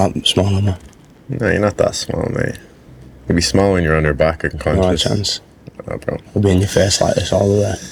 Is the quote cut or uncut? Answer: uncut